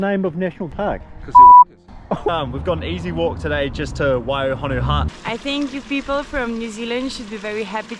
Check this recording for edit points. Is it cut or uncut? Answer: cut